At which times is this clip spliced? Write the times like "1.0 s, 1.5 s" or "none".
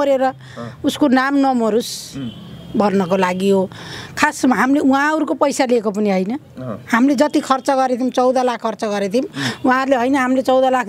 none

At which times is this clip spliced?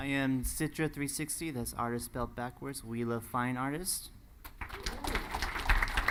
none

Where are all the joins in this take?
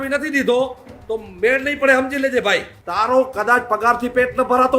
2.8 s

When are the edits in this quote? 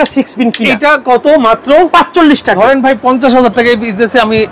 2.5 s

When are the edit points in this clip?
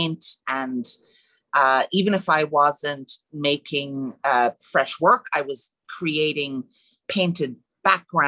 none

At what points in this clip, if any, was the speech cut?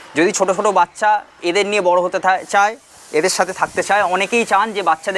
none

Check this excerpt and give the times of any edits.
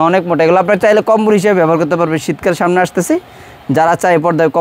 none

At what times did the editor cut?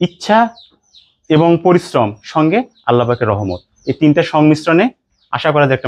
none

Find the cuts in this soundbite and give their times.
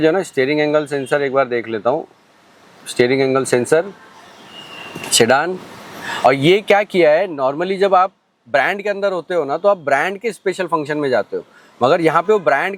none

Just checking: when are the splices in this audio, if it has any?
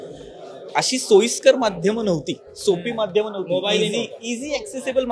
none

